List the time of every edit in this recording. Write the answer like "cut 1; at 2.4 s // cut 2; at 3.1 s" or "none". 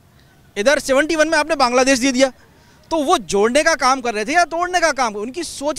none